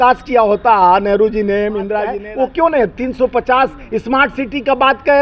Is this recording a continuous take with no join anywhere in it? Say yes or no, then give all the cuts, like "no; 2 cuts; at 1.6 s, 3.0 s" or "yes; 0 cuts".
no; 1 cut; at 2.2 s